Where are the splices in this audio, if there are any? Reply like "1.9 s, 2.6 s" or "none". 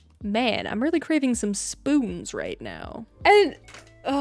3.2 s